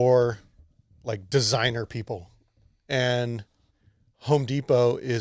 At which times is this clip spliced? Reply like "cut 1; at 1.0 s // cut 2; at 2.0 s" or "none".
none